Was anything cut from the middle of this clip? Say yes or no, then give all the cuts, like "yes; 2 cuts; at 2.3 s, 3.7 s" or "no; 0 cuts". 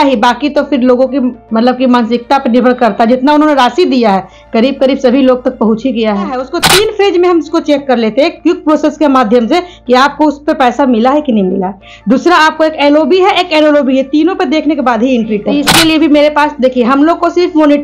yes; 2 cuts; at 6.5 s, 15.6 s